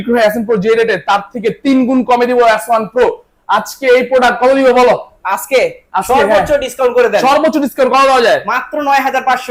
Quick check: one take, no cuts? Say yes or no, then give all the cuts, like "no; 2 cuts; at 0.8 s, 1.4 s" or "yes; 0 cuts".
yes; 0 cuts